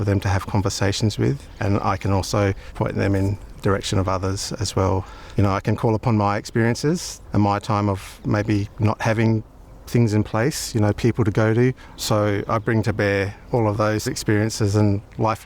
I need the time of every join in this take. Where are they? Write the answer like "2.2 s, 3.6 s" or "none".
1.5 s, 2.7 s, 5.1 s, 7.1 s, 8.4 s, 12.0 s, 13.9 s